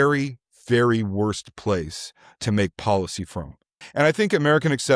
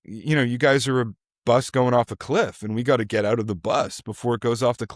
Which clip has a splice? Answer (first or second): first